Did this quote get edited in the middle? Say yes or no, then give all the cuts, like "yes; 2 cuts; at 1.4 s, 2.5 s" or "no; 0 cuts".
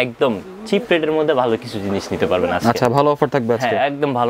no; 0 cuts